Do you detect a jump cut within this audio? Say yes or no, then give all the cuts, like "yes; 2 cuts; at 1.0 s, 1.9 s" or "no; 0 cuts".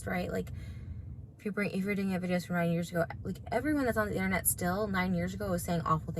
yes; 1 cut; at 4.7 s